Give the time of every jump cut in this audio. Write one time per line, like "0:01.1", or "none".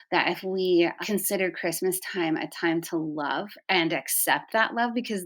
0:01.0
0:03.5